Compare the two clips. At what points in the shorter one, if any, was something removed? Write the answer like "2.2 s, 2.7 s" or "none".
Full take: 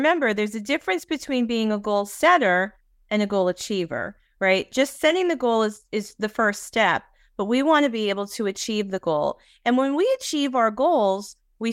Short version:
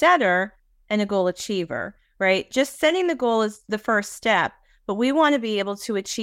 3.6 s